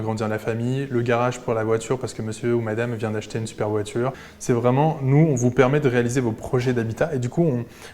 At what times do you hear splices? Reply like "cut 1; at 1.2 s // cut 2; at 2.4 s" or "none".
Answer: cut 1; at 4.3 s

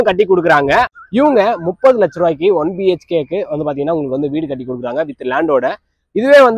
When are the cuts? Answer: cut 1; at 0.9 s

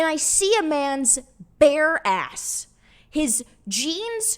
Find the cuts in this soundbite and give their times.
none

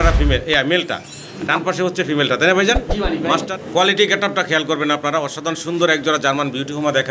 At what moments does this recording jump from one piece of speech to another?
cut 1; at 3.4 s

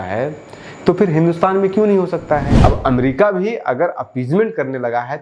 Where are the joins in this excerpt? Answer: cut 1; at 2.5 s

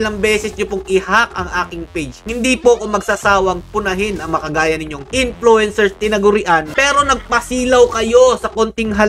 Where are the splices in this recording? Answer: cut 1; at 5.0 s // cut 2; at 6.7 s

